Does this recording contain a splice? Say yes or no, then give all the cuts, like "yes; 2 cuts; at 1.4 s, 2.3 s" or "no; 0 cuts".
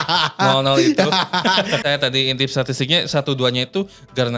yes; 1 cut; at 1.8 s